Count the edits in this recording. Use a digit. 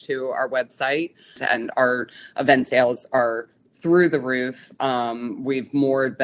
1